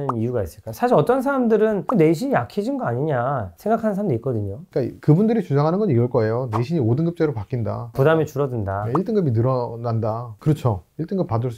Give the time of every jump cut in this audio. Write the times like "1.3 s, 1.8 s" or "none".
4.6 s